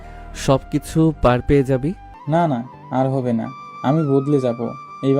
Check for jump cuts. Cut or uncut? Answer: cut